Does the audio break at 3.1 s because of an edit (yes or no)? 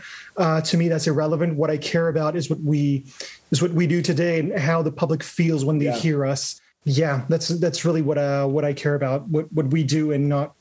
no